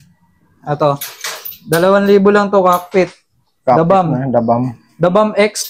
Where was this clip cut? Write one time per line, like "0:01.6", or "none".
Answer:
none